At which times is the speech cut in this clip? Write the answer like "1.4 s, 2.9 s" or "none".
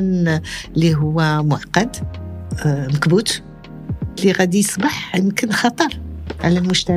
none